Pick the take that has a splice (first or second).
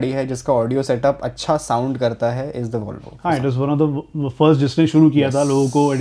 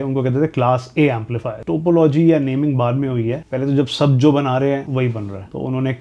second